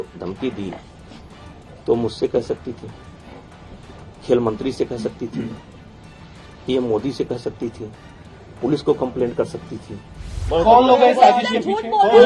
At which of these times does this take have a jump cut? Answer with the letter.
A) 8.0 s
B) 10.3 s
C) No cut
B